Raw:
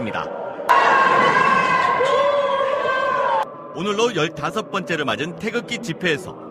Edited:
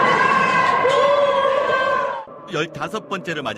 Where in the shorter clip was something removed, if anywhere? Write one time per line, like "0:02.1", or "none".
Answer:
0:02.5